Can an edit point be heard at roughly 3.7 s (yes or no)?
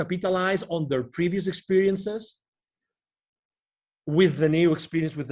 no